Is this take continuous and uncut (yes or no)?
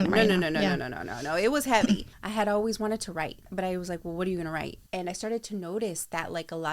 no